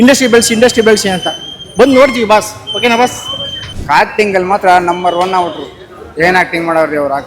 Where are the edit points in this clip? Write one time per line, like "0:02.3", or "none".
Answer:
0:03.8